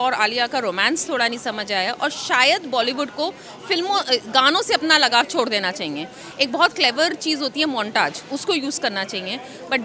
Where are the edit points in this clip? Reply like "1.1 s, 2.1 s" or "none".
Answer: none